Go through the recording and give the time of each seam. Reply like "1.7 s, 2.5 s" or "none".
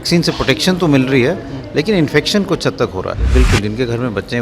3.1 s